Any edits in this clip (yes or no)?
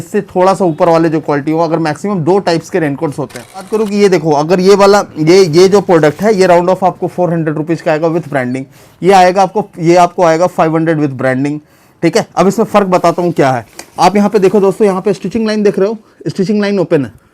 yes